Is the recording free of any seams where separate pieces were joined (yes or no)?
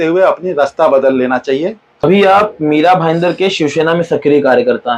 no